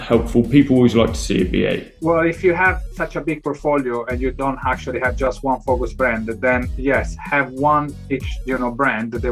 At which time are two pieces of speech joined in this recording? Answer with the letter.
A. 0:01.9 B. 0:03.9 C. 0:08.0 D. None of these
A